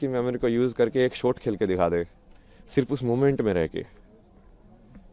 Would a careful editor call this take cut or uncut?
uncut